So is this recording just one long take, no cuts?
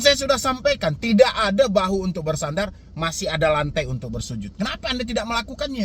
yes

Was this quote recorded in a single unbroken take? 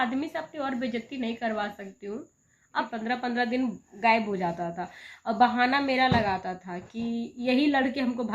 no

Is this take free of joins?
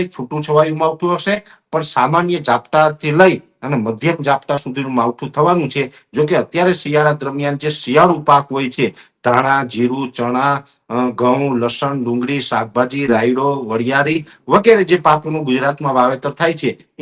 yes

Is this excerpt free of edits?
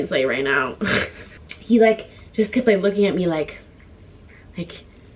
yes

